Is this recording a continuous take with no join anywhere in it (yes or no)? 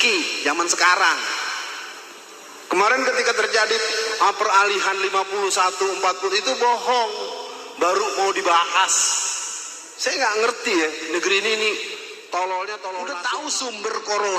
no